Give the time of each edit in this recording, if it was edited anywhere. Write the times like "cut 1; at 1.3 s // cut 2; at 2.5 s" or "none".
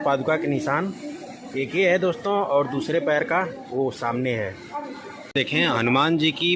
cut 1; at 5.3 s